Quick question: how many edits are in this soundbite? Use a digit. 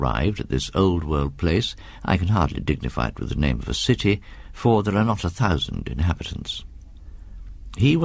1